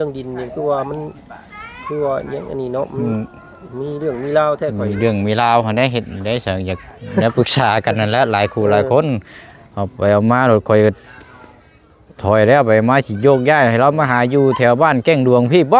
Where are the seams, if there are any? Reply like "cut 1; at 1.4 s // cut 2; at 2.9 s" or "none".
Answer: none